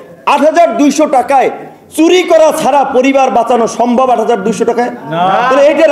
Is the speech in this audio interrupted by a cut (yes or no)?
no